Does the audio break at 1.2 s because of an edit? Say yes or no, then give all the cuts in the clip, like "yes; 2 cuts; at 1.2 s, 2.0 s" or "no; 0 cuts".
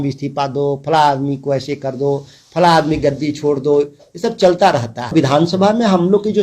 no; 1 cut; at 5.1 s